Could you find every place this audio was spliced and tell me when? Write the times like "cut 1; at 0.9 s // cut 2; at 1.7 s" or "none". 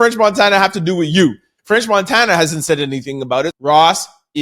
cut 1; at 1.5 s // cut 2; at 3.5 s